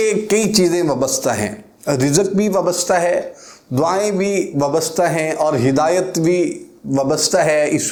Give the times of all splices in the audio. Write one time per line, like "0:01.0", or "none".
none